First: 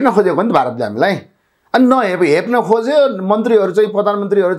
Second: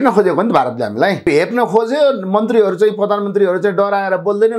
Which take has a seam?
second; 1 cut; at 1.2 s

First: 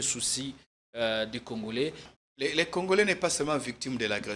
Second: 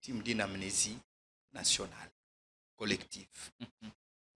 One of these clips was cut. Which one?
first; 1 cut; at 2.1 s

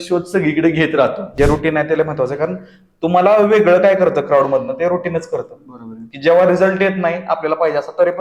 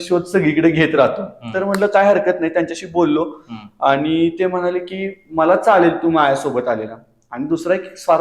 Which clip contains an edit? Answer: first; 1 cut; at 1.3 s

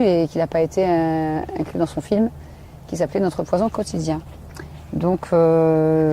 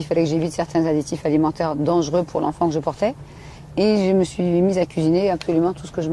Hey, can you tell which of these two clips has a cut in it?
first; 1 cut; at 2.9 s

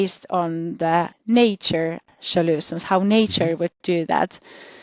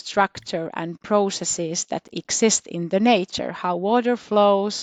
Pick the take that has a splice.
first; 2 cuts; at 1.2 s, 2.1 s

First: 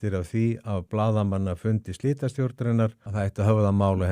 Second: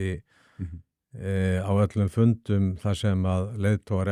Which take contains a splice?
first; 1 cut; at 3.0 s

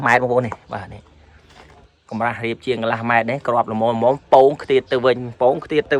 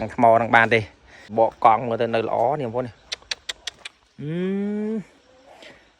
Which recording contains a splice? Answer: second; 1 cut; at 1.3 s

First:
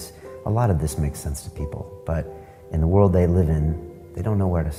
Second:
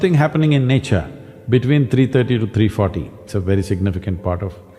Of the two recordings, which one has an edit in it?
second; 1 cut; at 3.2 s

